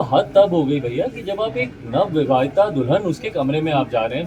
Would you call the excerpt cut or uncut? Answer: uncut